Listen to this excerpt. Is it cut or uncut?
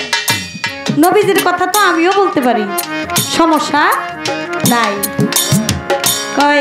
uncut